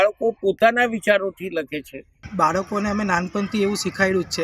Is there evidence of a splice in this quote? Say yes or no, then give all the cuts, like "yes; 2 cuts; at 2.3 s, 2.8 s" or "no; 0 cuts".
yes; 1 cut; at 2.2 s